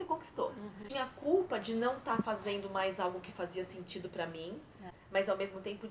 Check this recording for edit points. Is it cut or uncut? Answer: cut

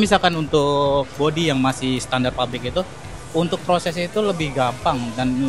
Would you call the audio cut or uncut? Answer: uncut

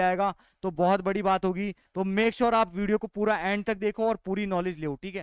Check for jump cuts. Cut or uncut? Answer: uncut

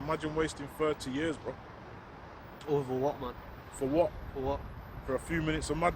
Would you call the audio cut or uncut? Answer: uncut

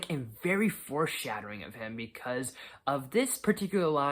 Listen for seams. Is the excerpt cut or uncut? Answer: uncut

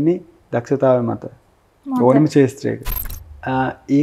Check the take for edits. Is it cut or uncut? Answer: cut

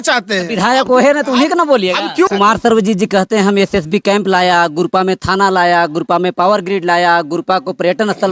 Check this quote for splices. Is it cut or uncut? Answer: cut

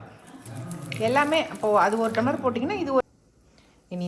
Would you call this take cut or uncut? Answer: cut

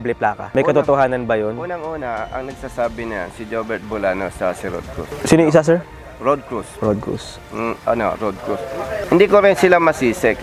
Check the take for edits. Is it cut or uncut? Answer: uncut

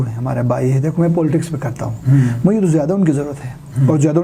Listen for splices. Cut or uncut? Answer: uncut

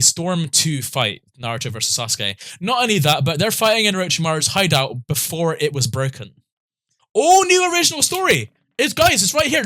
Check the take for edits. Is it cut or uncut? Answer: cut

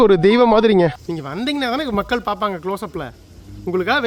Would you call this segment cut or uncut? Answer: cut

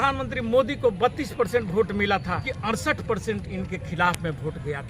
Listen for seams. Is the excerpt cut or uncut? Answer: cut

